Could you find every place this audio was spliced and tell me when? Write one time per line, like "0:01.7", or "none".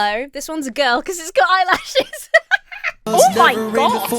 0:03.1

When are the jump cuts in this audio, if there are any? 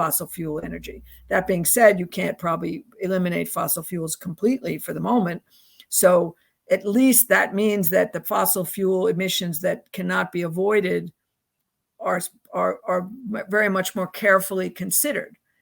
none

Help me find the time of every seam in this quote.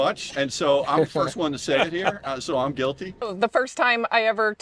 0:03.1

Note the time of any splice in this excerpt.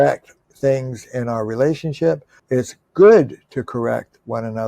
0:02.3

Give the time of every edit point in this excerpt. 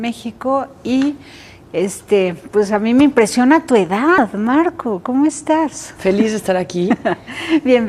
0:01.9

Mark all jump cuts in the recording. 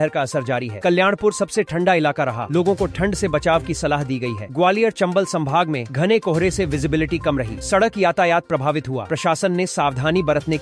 none

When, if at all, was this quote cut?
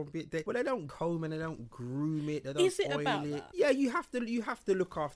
0:00.8
0:03.4

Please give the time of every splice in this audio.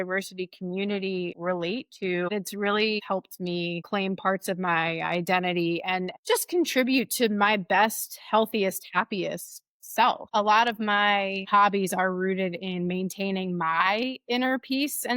0:01.3
0:02.3
0:03.3
0:10.2
0:11.5

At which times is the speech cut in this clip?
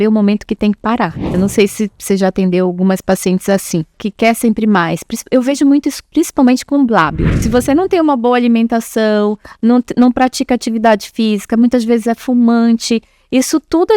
0:01.3
0:04.0
0:07.3

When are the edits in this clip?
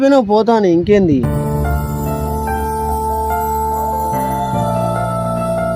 0:01.1

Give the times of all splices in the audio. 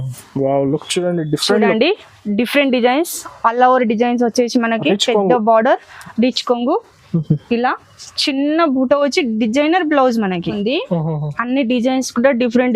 0:10.6

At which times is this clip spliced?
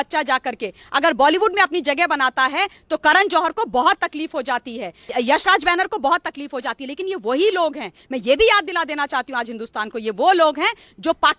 none

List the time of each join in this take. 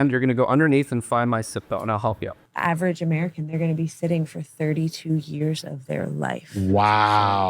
0:02.5

